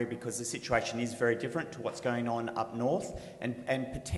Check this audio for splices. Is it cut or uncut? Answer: cut